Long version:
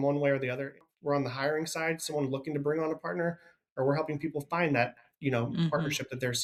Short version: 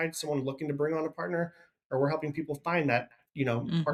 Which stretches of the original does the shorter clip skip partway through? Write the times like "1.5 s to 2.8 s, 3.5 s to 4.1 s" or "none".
none